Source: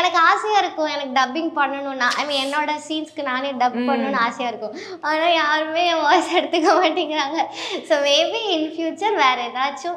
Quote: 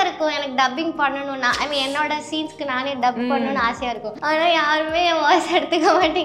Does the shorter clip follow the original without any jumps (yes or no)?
no